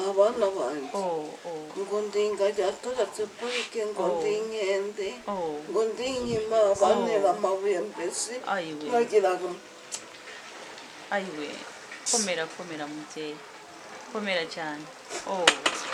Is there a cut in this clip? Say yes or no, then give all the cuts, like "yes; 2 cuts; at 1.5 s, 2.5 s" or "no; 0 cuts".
no; 0 cuts